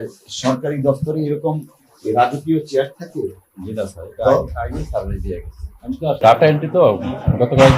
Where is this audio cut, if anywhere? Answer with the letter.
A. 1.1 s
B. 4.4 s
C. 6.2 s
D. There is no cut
C